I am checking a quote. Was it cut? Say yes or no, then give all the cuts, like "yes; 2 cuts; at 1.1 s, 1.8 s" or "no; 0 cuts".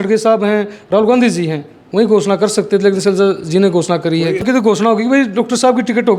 yes; 1 cut; at 4.4 s